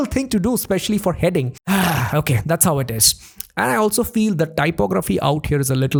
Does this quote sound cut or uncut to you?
uncut